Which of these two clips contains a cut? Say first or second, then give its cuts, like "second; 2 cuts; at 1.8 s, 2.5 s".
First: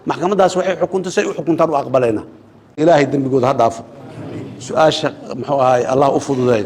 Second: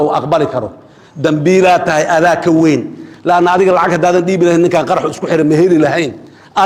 first; 1 cut; at 2.8 s